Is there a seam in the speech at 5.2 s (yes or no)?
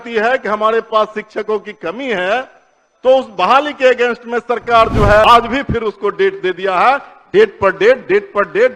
yes